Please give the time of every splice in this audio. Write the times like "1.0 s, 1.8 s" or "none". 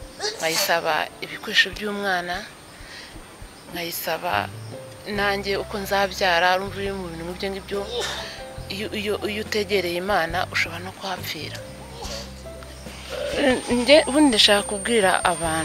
12.4 s